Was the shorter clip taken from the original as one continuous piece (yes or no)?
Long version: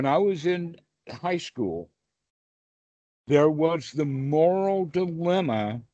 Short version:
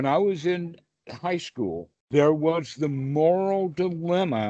no